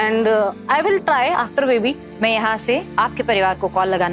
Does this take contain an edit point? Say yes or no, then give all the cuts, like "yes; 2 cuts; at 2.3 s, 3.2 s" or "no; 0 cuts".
yes; 2 cuts; at 2.1 s, 2.9 s